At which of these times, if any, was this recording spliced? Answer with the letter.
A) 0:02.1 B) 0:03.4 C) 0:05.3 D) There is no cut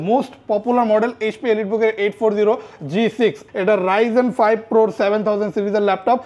B